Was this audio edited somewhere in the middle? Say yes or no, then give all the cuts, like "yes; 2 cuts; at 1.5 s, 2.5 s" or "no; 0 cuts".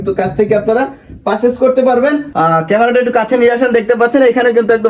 yes; 1 cut; at 2.3 s